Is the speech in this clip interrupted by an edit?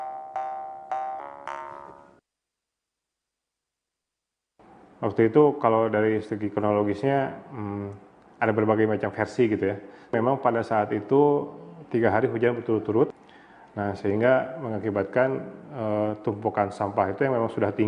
no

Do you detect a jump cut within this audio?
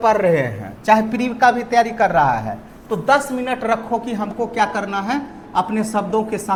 no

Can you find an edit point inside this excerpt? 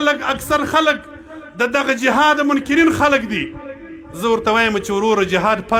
no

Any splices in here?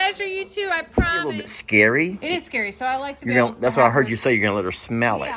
yes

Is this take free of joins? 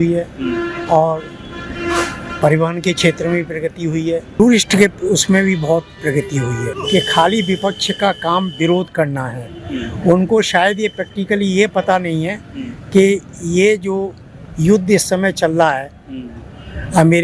no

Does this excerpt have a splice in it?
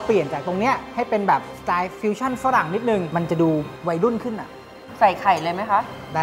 yes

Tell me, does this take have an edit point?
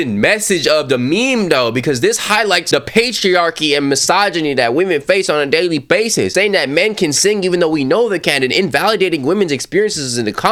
no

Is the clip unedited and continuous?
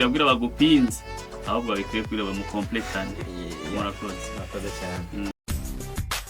no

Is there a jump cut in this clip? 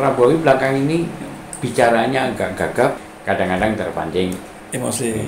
yes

